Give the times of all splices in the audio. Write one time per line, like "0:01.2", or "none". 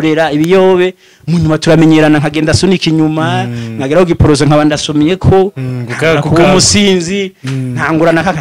none